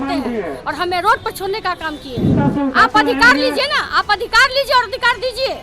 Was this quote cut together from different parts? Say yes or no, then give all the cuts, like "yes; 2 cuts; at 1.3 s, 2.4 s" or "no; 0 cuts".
yes; 1 cut; at 2.3 s